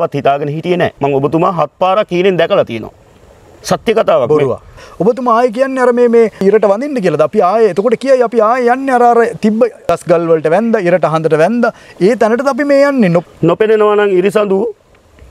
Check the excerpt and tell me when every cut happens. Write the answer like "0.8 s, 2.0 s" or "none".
0.9 s, 4.8 s, 6.4 s, 9.8 s, 13.2 s